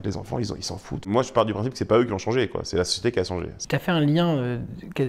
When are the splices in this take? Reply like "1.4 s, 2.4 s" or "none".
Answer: 1.0 s, 3.5 s